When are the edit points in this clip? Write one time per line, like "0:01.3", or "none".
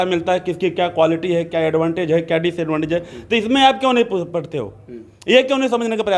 none